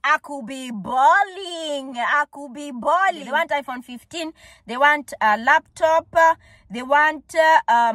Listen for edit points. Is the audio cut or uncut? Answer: cut